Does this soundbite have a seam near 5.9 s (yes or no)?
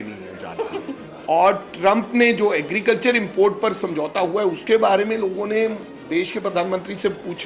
no